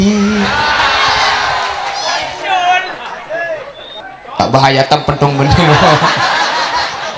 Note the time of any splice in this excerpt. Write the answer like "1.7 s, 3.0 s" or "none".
4.0 s